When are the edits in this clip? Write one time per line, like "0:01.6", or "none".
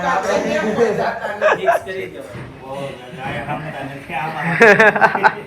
0:02.1